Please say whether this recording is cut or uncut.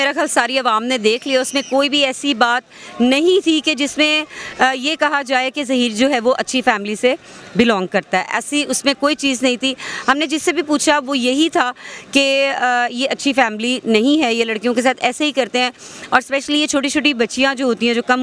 uncut